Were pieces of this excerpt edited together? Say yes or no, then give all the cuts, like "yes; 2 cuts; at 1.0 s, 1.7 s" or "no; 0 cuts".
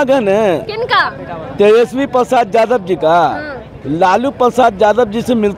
no; 0 cuts